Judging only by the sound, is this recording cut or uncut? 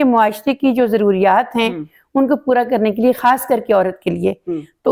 uncut